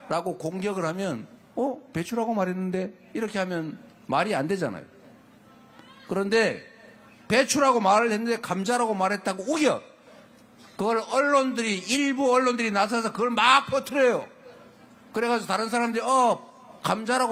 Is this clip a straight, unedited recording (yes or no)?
yes